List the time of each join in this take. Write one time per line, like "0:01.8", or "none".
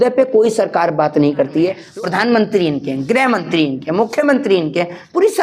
0:01.8